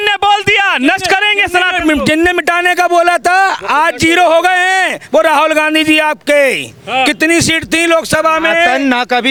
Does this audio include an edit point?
no; 0 cuts

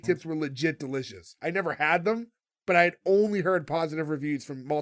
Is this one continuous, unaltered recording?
yes; 0 cuts

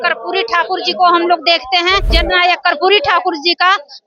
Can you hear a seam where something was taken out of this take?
yes; 1 cut; at 2.1 s

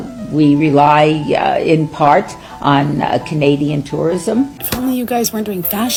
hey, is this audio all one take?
yes; 0 cuts

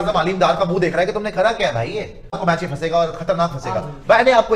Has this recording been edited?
yes; 1 cut; at 2.4 s

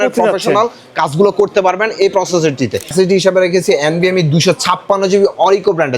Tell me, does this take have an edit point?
yes; 1 cut; at 2.9 s

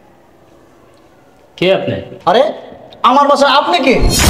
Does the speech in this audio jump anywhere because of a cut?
no; 0 cuts

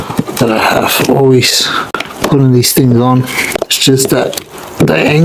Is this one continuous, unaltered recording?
yes; 0 cuts

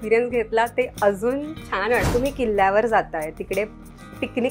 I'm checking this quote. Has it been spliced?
yes; 1 cut; at 2.1 s

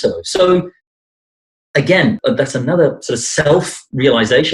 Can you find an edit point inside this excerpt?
yes; 1 cut; at 2.2 s

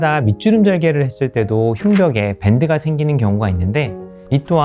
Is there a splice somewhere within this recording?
no; 0 cuts

